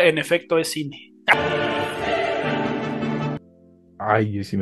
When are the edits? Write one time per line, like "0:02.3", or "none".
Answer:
0:03.4